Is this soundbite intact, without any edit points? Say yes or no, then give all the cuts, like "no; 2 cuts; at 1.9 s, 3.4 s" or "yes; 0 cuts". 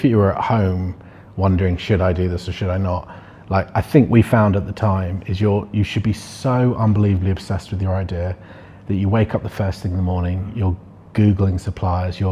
yes; 0 cuts